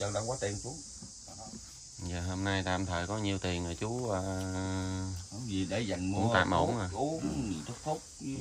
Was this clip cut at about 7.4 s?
no; 1 cut; at 1.1 s

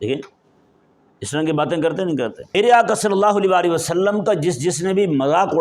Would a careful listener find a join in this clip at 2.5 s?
yes; 1 cut; at 2.5 s

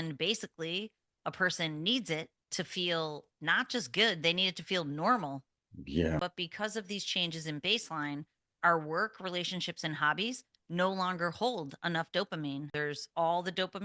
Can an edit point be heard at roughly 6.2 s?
yes; 2 cuts; at 6.2 s, 12.7 s

